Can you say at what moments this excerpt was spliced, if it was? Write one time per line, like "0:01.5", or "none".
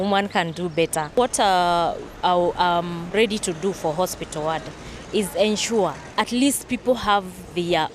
0:01.2
0:06.0